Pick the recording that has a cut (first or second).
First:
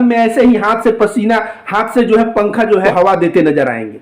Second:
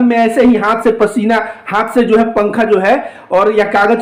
first